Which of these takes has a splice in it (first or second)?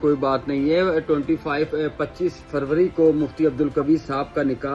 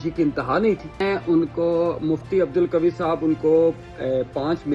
second